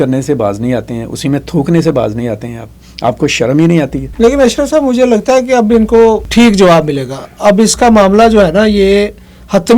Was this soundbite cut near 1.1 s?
no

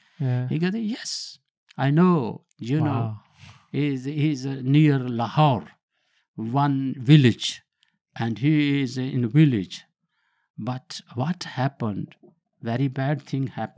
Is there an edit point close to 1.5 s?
no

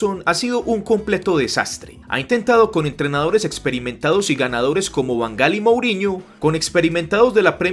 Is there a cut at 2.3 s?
no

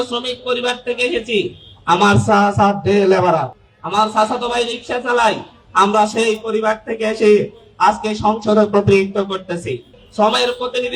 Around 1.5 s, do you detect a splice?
no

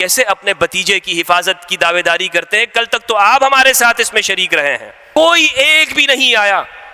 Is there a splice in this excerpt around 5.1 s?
yes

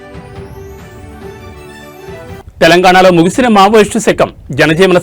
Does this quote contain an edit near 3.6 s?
no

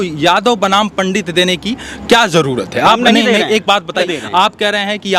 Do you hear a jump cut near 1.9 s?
no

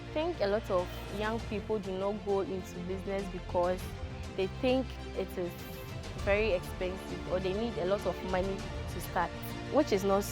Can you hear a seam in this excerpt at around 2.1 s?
no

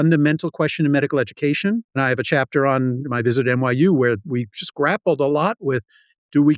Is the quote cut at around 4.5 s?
no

